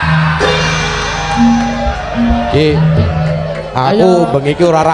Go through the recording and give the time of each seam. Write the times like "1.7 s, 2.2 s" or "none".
none